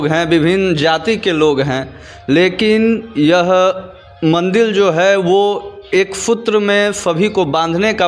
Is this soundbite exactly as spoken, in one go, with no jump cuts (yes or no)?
yes